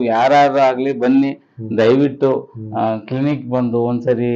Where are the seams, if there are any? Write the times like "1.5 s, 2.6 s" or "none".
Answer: none